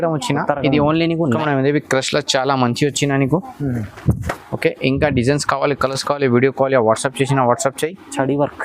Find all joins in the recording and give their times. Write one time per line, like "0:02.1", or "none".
0:01.4